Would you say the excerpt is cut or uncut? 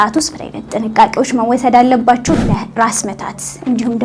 cut